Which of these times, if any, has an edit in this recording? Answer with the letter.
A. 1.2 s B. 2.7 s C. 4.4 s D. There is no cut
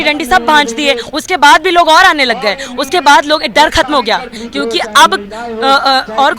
C